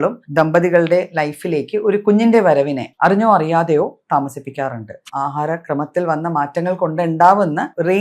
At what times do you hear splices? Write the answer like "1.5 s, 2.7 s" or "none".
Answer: 2.8 s, 5.1 s